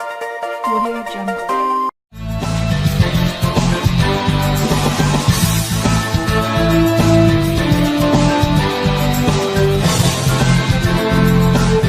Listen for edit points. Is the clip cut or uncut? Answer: cut